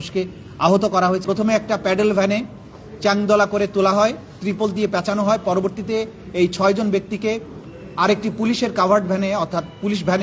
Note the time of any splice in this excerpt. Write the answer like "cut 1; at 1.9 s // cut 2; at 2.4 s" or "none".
cut 1; at 1.2 s